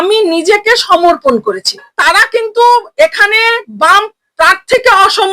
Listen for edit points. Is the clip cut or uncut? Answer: cut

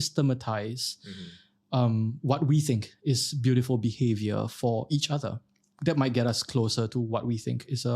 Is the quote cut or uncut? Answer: cut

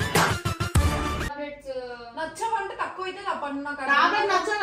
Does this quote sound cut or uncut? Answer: uncut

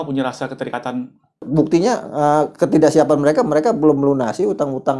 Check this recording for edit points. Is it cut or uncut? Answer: cut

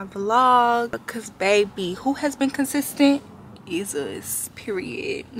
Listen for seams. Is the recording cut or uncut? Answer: cut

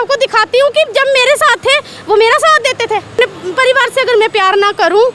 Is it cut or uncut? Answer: cut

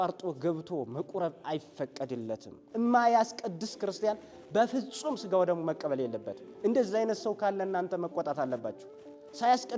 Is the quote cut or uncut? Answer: uncut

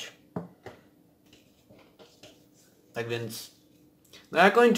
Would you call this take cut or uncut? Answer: cut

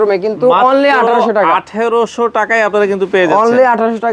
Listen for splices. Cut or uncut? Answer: uncut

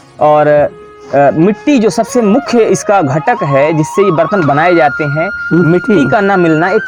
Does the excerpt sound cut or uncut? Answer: uncut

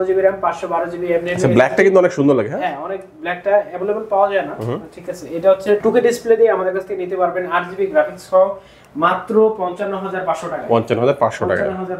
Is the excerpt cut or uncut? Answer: uncut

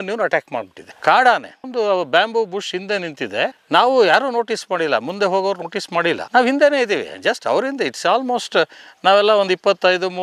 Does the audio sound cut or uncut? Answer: uncut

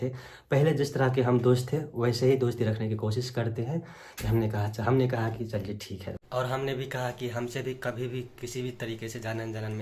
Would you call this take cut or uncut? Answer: uncut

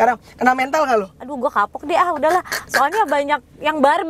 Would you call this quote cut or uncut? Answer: cut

